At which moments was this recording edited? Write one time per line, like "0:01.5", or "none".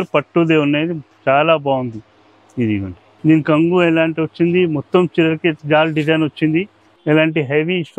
0:03.0
0:05.6
0:06.8

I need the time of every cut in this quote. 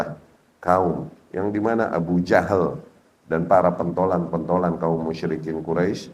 none

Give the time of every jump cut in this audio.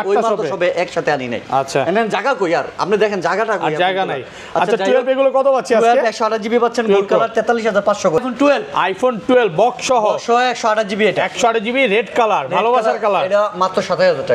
0:08.2

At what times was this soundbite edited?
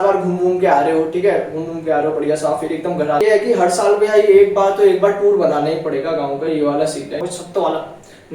0:03.2
0:07.2

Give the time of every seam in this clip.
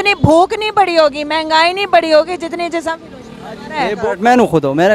0:03.9

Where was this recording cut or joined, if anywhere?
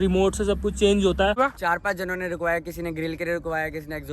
0:01.4

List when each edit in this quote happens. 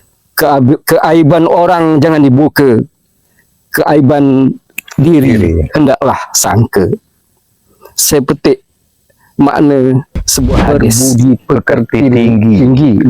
0:10.7

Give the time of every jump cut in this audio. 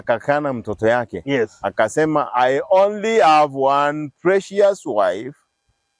none

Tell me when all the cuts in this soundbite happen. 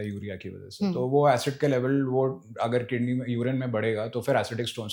none

